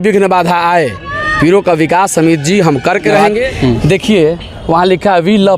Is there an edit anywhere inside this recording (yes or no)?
yes